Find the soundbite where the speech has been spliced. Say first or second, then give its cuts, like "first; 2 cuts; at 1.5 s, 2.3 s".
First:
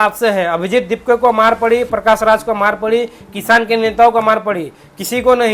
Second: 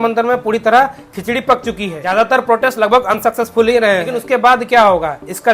second; 2 cuts; at 1.9 s, 4.1 s